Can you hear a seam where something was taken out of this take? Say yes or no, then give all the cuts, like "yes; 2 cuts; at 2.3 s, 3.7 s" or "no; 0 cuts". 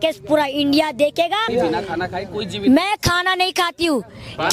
yes; 1 cut; at 1.5 s